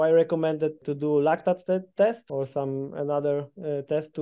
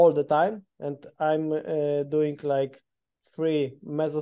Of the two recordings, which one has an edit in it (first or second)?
first